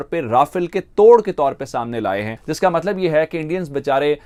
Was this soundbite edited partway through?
no; 0 cuts

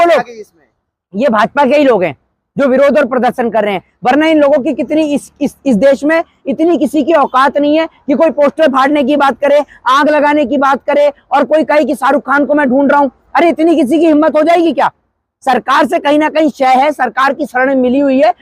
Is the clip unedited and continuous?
yes; 0 cuts

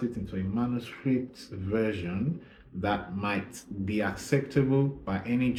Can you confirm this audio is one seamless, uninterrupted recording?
yes; 0 cuts

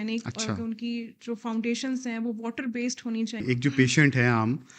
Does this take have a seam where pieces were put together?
yes; 1 cut; at 3.4 s

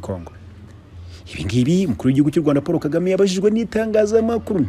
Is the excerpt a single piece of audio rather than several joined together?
yes; 0 cuts

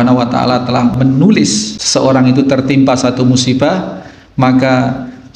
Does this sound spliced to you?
yes; 2 cuts; at 0.9 s, 1.7 s

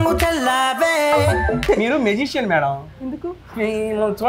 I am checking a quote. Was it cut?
yes; 1 cut; at 1.6 s

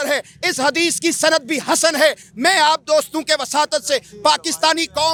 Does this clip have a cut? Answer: no; 0 cuts

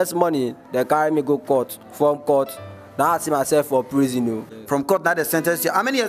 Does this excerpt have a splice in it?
yes; 1 cut; at 4.5 s

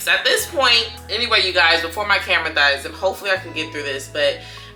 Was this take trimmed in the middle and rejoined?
no; 0 cuts

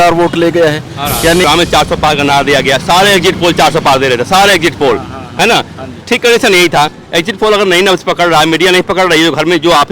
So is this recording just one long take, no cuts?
no; 1 cut; at 1.4 s

